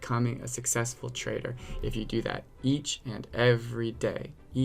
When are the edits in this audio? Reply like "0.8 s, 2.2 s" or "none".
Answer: none